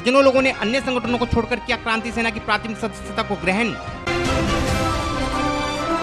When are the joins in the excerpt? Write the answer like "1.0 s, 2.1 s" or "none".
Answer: none